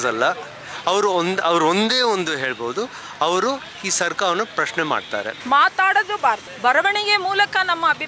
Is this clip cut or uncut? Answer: cut